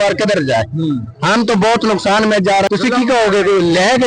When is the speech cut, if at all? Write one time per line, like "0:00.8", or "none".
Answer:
0:02.7